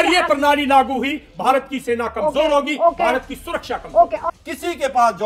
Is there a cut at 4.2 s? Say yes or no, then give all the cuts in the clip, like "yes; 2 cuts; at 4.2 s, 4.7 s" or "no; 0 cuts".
yes; 1 cut; at 4.2 s